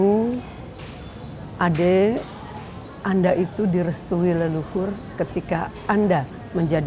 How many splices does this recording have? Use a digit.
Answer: 0